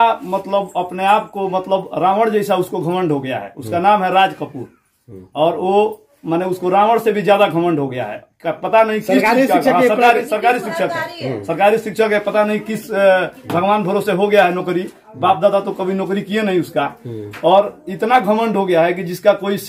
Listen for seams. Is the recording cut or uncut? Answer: uncut